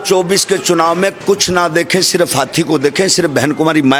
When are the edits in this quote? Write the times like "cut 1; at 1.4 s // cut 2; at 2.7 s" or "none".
none